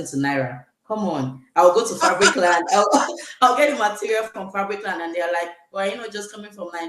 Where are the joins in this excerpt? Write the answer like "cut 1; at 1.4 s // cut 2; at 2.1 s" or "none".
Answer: none